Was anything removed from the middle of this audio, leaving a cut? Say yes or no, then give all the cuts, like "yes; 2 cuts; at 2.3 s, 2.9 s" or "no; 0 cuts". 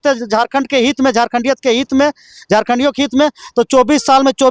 no; 0 cuts